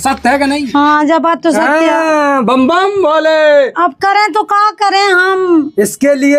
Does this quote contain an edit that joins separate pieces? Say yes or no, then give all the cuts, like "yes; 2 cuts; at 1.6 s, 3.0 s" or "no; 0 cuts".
no; 0 cuts